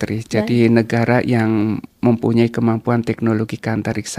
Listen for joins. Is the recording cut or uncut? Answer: uncut